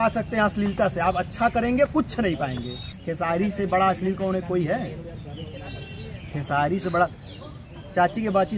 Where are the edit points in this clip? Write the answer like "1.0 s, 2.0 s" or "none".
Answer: 2.9 s